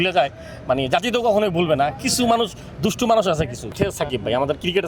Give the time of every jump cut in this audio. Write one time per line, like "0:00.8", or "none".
0:03.7